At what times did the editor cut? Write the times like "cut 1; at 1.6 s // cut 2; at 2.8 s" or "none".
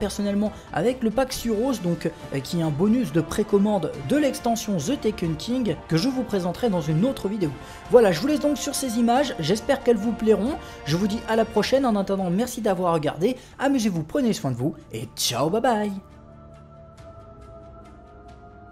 none